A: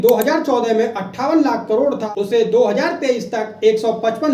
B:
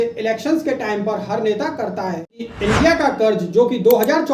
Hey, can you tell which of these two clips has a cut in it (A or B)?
B